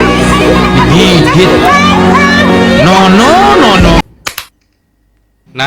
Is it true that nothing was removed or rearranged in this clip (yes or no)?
no